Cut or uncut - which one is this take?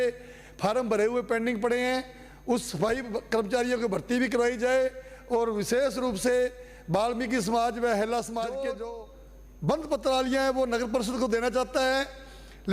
cut